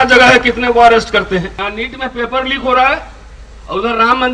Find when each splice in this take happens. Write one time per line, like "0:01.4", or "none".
0:01.6

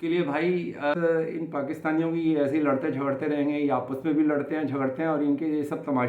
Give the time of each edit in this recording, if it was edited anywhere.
0:00.9

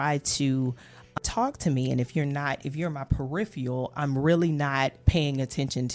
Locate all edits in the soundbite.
0:01.2

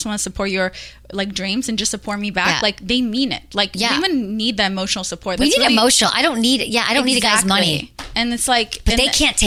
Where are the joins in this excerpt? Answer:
none

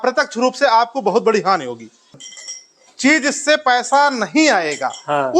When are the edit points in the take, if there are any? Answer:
0:02.2

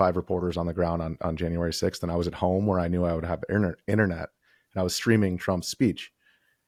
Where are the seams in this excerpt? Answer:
none

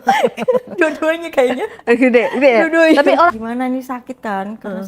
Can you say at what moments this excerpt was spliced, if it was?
0:03.3

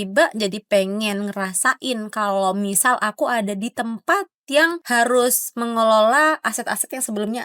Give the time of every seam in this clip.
0:04.8

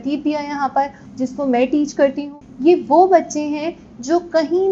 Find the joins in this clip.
0:01.0
0:02.3

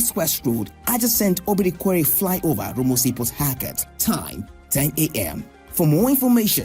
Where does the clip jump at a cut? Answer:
none

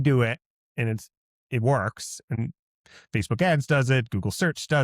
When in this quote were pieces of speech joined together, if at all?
0:02.4

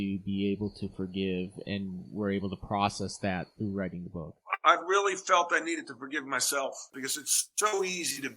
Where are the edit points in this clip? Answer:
0:01.6
0:06.9

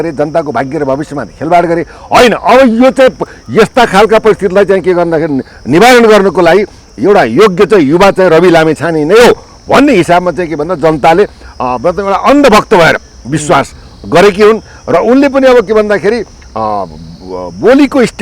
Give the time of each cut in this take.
none

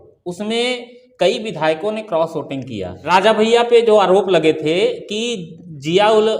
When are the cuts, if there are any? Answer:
0:03.2

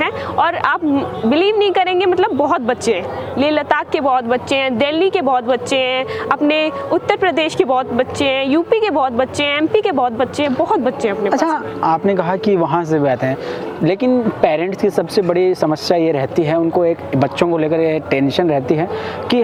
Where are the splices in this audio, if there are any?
none

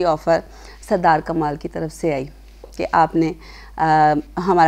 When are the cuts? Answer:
none

